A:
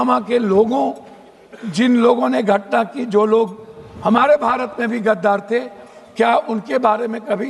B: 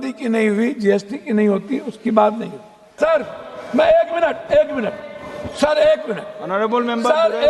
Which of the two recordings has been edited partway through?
B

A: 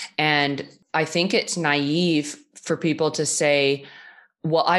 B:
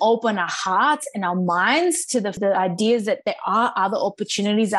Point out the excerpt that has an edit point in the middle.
B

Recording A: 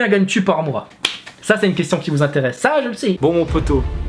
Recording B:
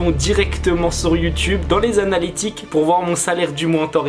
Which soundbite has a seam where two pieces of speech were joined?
A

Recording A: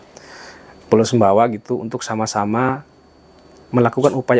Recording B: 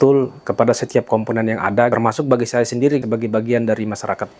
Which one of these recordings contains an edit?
B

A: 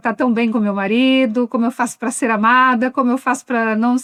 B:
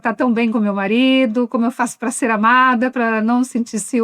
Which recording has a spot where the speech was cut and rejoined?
B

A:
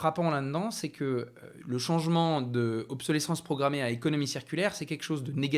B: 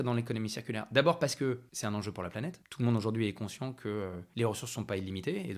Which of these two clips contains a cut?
B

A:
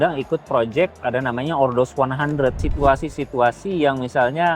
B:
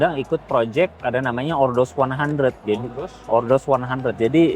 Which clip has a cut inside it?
A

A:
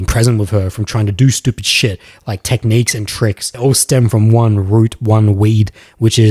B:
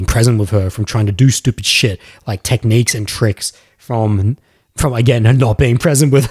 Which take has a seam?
A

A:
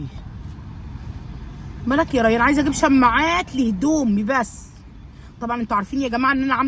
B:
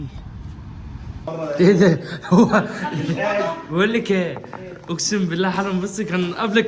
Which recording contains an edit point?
B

